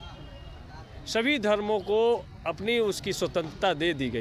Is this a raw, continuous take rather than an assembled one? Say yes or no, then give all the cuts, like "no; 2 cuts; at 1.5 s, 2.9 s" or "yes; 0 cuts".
yes; 0 cuts